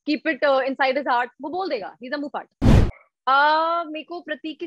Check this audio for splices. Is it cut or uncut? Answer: cut